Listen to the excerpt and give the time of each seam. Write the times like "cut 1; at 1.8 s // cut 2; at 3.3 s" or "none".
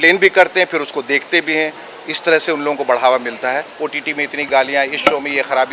cut 1; at 3.7 s